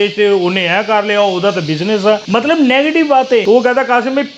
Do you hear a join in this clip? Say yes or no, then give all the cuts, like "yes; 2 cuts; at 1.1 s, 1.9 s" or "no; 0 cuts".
yes; 2 cuts; at 2.2 s, 3.4 s